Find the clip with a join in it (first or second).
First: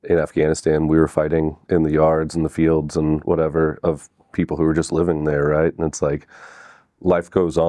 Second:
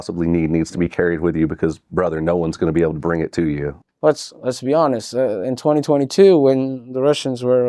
second